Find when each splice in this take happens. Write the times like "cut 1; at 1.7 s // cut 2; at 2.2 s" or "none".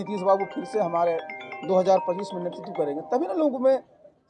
none